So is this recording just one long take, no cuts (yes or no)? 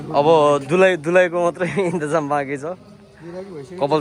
yes